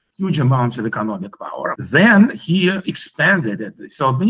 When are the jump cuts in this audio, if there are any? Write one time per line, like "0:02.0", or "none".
0:01.8